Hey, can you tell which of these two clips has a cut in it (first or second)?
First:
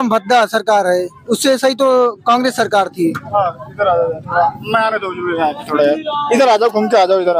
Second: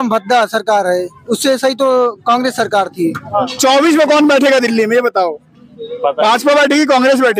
second